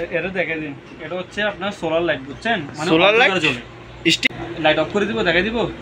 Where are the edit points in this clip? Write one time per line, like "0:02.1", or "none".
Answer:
0:04.2